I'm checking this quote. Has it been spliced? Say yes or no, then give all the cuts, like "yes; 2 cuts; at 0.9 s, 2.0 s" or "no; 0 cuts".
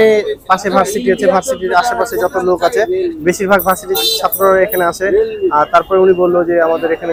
no; 0 cuts